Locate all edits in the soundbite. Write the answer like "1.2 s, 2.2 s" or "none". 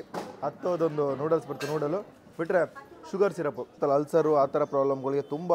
3.8 s